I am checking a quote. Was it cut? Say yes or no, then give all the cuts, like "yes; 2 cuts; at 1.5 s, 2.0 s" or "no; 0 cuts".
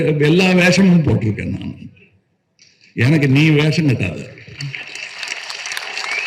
no; 0 cuts